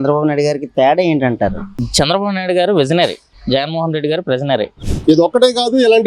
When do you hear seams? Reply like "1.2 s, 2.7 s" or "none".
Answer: 4.9 s